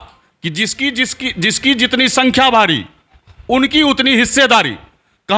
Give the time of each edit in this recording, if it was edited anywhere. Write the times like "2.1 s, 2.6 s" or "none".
none

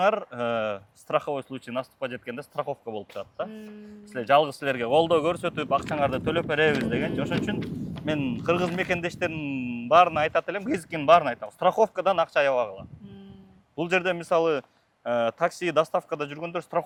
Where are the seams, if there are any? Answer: none

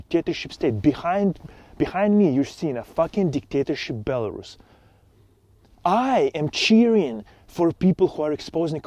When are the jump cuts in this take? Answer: none

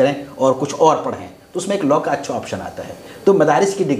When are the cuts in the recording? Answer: none

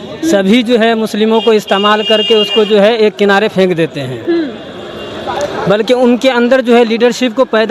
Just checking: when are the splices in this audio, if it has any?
none

